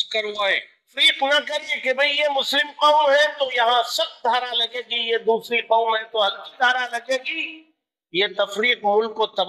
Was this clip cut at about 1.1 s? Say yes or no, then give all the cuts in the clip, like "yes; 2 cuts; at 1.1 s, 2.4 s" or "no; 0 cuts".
yes; 1 cut; at 1.1 s